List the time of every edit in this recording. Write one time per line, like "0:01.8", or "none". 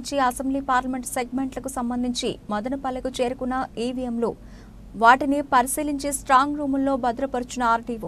none